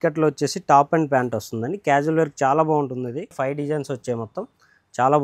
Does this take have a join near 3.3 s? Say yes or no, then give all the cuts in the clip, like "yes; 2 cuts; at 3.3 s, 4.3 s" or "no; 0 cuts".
yes; 1 cut; at 3.3 s